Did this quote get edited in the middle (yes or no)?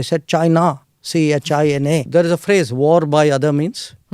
yes